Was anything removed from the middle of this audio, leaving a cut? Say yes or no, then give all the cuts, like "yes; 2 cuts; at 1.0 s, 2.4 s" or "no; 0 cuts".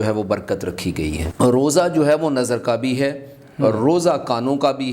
yes; 1 cut; at 1.2 s